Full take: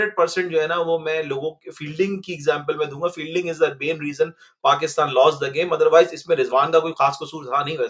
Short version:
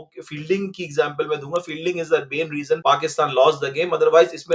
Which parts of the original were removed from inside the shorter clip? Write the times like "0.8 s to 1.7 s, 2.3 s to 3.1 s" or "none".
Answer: 4.3 s to 4.6 s